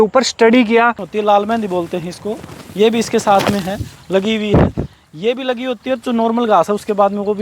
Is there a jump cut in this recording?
yes; 1 cut; at 1.1 s

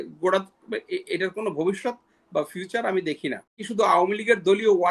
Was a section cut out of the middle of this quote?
yes; 1 cut; at 3.6 s

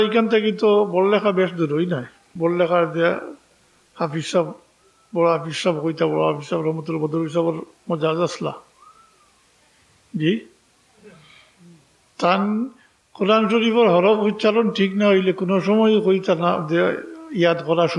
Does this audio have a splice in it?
yes; 1 cut; at 2.3 s

